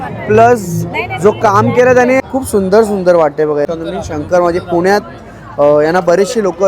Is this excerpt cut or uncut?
cut